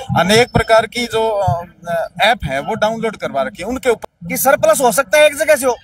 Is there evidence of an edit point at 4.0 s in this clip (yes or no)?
yes